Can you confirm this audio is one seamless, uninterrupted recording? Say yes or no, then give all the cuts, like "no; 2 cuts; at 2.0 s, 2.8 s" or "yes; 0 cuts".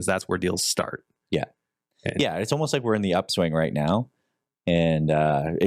yes; 0 cuts